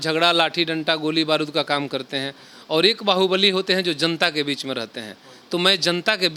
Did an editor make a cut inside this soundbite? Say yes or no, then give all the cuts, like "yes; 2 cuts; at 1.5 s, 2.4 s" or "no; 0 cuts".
no; 0 cuts